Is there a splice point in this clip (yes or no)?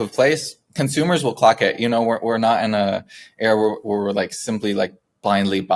no